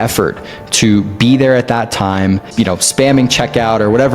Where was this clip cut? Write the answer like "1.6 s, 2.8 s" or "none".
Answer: none